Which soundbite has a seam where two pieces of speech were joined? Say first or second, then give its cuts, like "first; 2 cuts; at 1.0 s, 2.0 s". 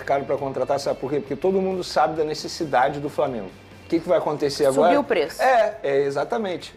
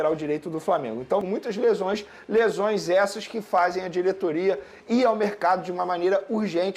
second; 1 cut; at 1.2 s